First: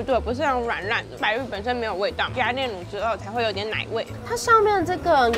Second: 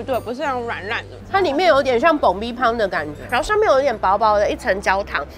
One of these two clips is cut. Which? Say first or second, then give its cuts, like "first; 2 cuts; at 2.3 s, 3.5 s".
second; 2 cuts; at 1.2 s, 3.2 s